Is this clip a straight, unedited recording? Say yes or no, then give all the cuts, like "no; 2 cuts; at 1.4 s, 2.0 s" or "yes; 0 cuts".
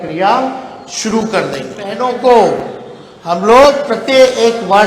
no; 1 cut; at 1.9 s